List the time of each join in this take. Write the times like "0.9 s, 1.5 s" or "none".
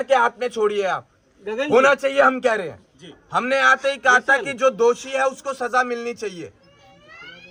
none